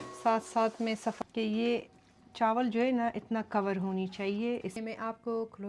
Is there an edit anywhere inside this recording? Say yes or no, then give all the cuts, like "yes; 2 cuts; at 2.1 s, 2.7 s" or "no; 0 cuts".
yes; 2 cuts; at 1.2 s, 4.8 s